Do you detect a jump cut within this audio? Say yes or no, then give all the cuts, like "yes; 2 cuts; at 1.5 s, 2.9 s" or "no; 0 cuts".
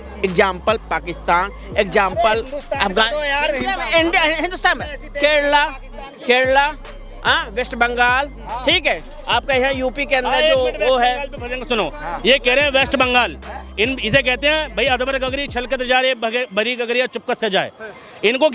no; 0 cuts